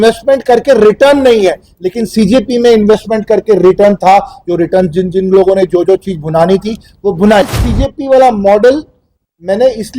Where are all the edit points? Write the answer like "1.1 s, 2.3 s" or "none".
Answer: 7.4 s